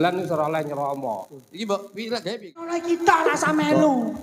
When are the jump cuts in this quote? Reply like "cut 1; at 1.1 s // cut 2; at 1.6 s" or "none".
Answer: cut 1; at 2.8 s